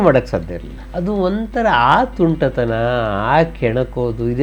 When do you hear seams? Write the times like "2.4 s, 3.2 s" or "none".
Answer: none